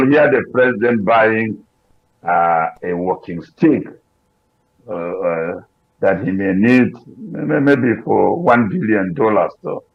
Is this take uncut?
yes; 0 cuts

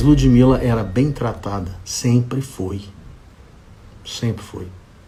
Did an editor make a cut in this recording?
no; 0 cuts

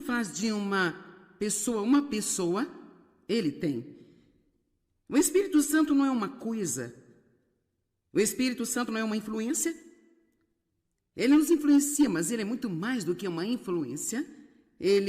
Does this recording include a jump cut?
no; 0 cuts

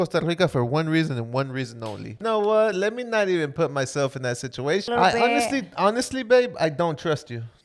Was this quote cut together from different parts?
yes; 2 cuts; at 2.2 s, 4.9 s

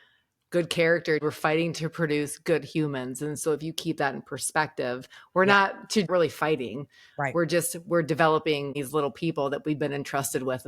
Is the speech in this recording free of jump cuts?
no; 3 cuts; at 1.2 s, 6.1 s, 8.7 s

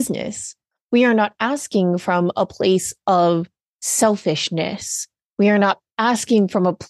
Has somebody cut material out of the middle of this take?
yes; 1 cut; at 5.9 s

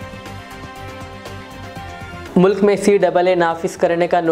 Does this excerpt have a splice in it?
yes; 1 cut; at 2.2 s

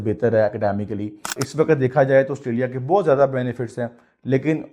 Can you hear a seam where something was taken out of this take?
yes; 1 cut; at 1.4 s

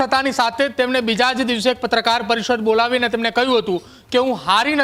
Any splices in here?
no; 0 cuts

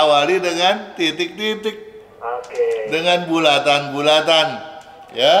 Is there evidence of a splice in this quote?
no; 0 cuts

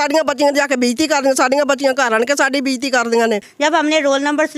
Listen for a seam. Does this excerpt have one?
yes; 1 cut; at 3.5 s

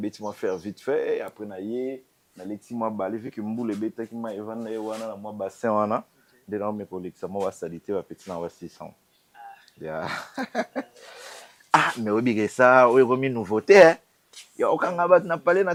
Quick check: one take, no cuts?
yes; 0 cuts

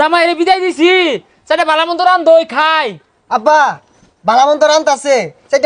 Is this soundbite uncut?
yes; 0 cuts

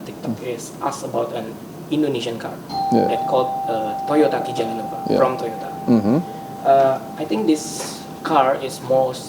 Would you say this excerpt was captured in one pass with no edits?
yes; 0 cuts

